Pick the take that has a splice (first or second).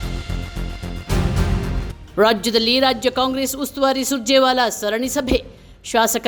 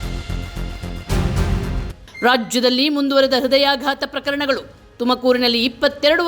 second